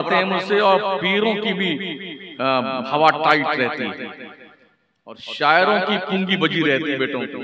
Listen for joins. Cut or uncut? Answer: uncut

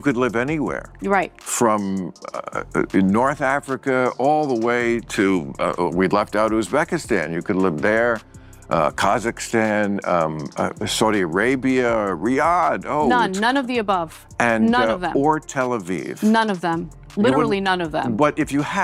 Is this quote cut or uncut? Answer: uncut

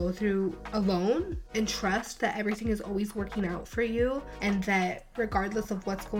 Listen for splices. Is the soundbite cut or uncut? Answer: uncut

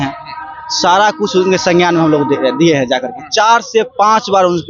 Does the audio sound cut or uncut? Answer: uncut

